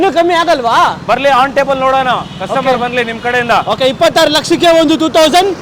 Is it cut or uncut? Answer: uncut